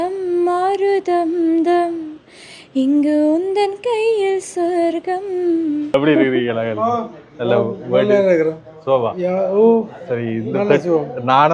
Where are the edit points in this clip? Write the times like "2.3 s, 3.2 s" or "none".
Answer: 5.9 s